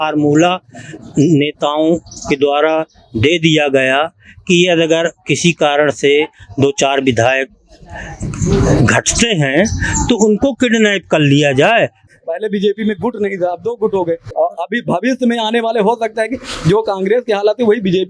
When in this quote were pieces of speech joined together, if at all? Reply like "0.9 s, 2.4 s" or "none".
12.1 s, 14.3 s